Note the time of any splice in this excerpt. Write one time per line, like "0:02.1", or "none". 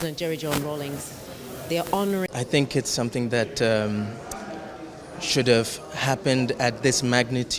0:02.3